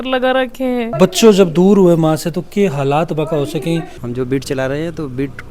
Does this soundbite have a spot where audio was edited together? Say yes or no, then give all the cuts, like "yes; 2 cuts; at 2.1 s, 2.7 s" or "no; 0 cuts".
yes; 2 cuts; at 0.9 s, 4.0 s